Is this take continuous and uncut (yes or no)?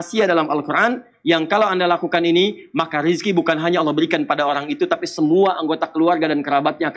yes